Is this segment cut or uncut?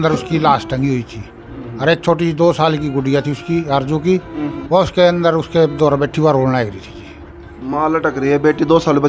uncut